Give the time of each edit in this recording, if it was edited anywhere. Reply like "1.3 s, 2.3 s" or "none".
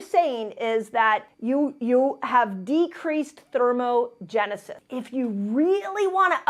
4.7 s

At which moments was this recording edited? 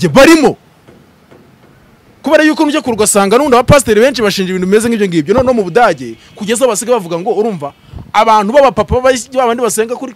none

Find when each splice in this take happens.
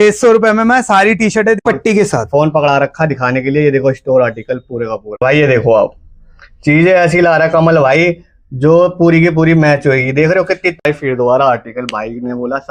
1.6 s, 5.2 s, 10.8 s

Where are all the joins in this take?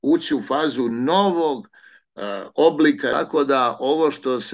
3.1 s

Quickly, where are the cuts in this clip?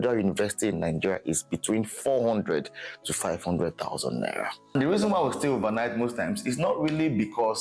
4.6 s

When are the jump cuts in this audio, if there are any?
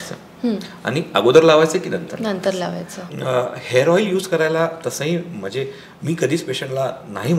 3.0 s

